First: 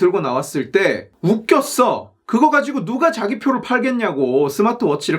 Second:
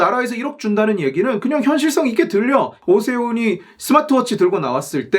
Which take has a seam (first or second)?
second